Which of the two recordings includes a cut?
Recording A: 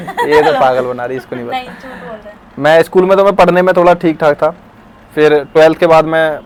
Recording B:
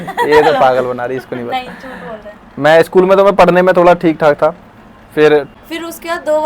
B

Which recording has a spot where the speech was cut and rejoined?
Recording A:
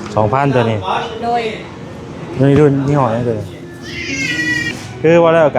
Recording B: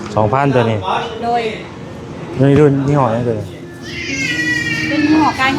A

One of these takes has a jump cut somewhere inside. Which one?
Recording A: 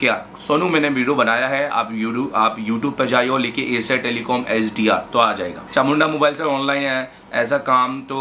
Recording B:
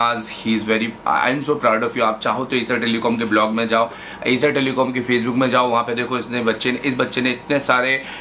A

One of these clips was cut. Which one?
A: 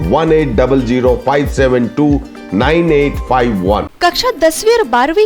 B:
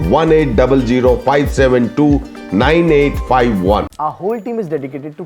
A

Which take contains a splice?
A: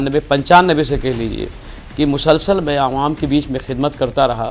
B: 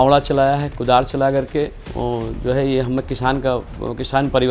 B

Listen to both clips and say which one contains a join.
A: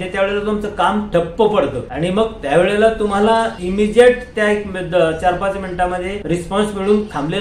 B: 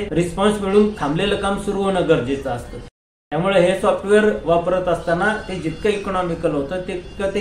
B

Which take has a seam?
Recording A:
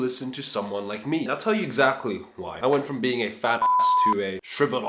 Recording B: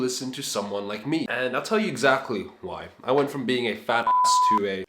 A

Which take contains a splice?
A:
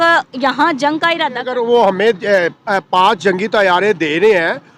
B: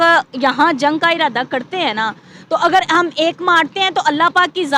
A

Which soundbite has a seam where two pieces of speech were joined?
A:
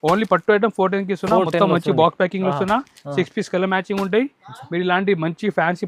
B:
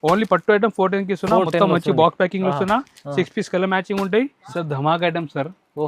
B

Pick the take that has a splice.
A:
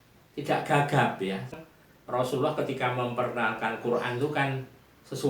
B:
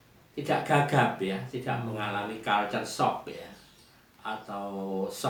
A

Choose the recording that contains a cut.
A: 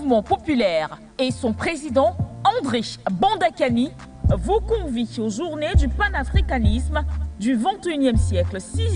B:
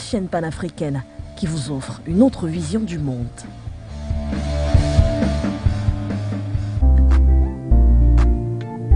B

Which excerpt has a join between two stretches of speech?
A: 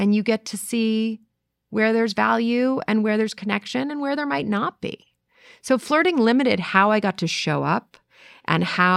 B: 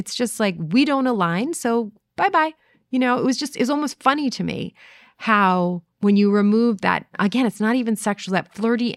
B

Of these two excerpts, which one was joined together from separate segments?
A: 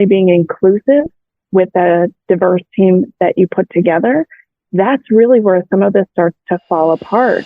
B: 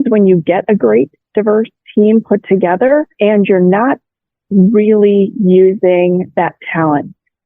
B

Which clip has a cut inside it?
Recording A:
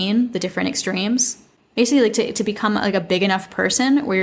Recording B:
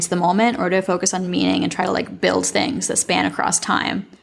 A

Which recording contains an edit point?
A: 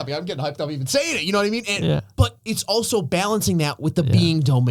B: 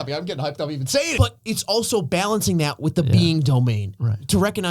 B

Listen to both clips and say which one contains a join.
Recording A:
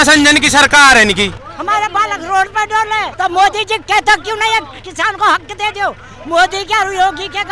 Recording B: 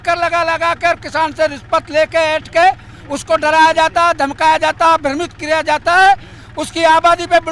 A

